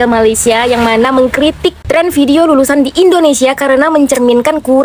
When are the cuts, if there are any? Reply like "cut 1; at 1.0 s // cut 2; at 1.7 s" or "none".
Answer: none